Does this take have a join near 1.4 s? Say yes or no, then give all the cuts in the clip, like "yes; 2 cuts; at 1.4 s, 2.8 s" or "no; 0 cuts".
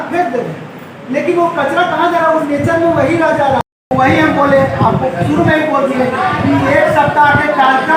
no; 1 cut; at 3.6 s